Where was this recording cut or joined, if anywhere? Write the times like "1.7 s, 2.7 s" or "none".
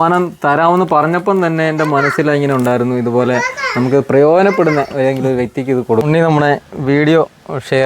6.0 s